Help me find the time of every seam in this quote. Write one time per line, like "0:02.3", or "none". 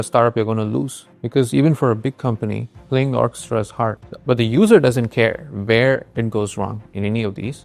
0:04.0

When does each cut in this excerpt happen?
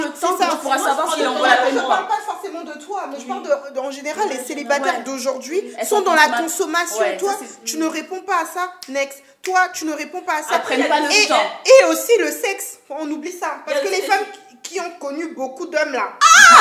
none

